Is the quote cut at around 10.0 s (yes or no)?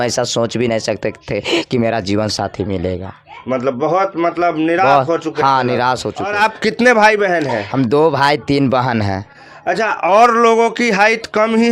no